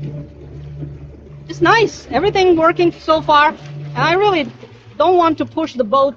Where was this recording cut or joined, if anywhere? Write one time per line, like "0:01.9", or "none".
none